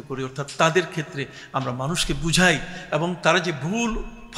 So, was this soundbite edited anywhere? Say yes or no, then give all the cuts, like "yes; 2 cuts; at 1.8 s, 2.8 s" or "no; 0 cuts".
no; 0 cuts